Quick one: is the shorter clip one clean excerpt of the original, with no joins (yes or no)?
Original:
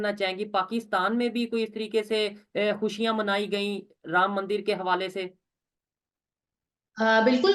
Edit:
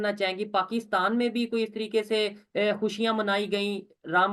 yes